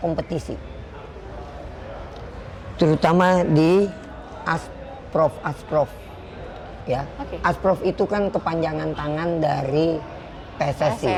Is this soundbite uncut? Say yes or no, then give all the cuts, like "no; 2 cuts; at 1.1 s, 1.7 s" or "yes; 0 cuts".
yes; 0 cuts